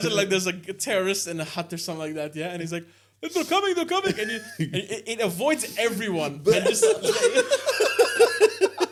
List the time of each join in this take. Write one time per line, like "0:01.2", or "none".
none